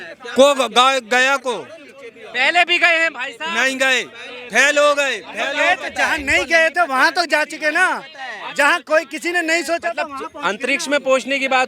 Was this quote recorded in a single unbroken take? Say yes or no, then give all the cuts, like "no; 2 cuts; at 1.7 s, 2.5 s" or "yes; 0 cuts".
yes; 0 cuts